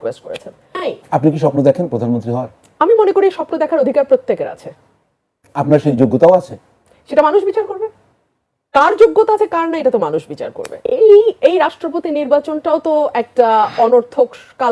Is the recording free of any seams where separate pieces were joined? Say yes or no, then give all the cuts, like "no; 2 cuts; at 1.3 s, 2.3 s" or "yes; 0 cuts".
no; 2 cuts; at 0.8 s, 10.8 s